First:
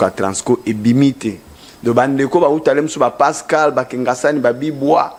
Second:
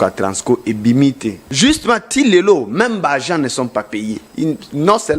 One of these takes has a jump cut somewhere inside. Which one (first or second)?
second